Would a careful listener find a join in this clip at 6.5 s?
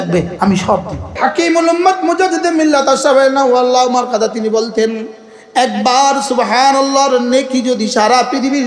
no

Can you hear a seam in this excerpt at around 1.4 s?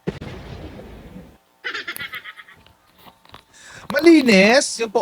yes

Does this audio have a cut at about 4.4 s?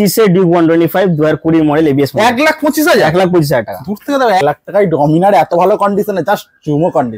yes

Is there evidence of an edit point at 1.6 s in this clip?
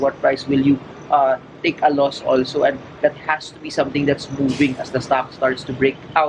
no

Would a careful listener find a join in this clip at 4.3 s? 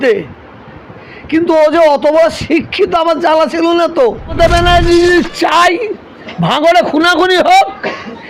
yes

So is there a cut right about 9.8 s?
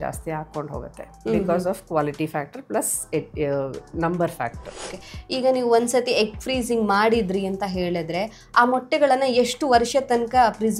no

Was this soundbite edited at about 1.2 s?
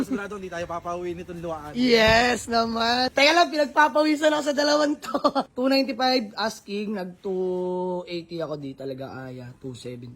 no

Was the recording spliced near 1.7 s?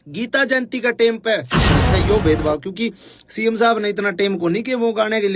yes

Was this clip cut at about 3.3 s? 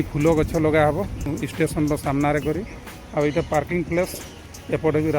no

